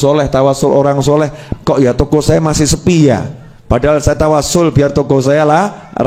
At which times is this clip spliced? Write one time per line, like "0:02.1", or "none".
none